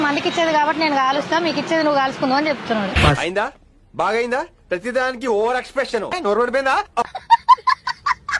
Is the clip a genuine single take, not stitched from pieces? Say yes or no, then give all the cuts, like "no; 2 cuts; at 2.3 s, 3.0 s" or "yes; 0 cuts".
yes; 0 cuts